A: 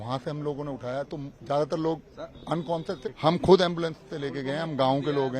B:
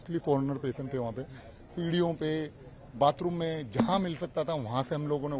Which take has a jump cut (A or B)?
A